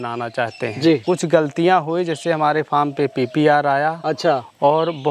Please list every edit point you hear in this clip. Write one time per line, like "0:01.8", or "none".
0:01.0